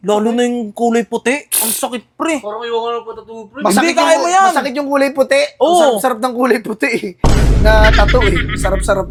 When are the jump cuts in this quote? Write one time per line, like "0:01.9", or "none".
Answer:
none